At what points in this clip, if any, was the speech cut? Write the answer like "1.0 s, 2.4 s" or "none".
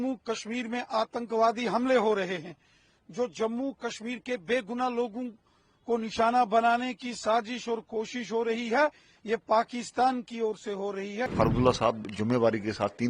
11.3 s